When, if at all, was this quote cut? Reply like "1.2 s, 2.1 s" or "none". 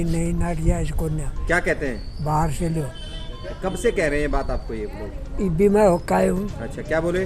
none